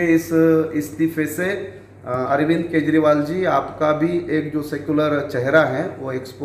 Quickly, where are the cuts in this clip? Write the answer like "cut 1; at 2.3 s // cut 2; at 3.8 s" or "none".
none